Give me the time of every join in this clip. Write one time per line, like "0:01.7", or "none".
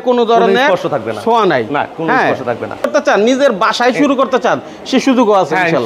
0:02.8